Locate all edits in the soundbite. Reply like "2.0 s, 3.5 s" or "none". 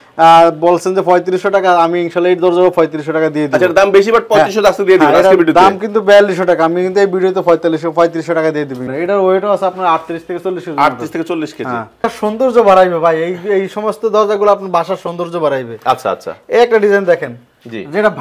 8.8 s, 12.0 s